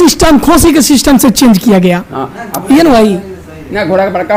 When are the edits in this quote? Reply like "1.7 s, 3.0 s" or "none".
none